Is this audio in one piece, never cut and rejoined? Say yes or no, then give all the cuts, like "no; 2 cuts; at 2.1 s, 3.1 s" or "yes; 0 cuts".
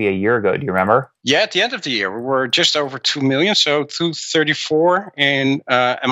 no; 1 cut; at 1.1 s